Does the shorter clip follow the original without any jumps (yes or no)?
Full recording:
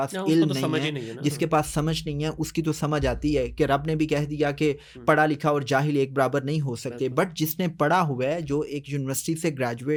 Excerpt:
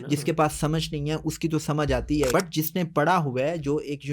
no